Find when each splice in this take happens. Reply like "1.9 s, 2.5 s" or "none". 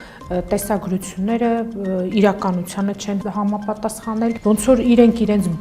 3.2 s, 4.4 s